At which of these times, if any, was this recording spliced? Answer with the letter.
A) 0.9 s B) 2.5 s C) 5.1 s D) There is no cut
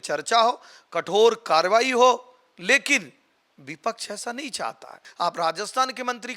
C